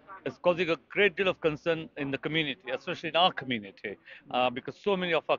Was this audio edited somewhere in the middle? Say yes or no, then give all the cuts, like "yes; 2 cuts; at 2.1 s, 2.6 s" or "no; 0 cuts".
no; 0 cuts